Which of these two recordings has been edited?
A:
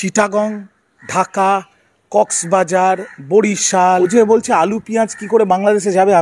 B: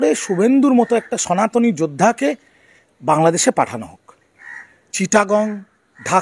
A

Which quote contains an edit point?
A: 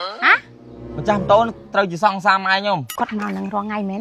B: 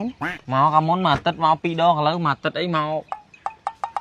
A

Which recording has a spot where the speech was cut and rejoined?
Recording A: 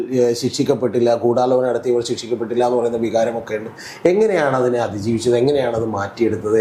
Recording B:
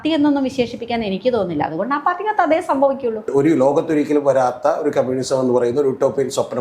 B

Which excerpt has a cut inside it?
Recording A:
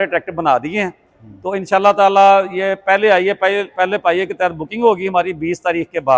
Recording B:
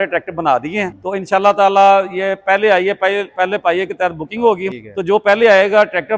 B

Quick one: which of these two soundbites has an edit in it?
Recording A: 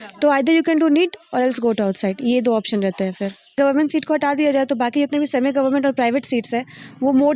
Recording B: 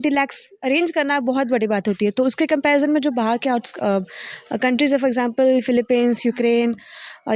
A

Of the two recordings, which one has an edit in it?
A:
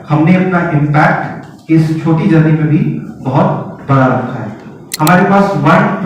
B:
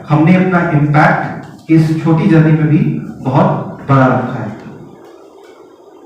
A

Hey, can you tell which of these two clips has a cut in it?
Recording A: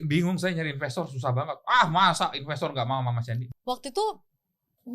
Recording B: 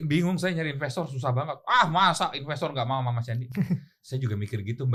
A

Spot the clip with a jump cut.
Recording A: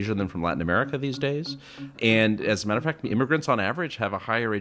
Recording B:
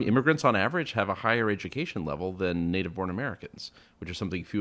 A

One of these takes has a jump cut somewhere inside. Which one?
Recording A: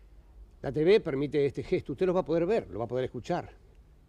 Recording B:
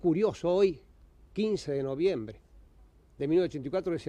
B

